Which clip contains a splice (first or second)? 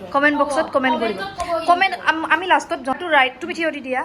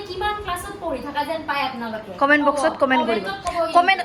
first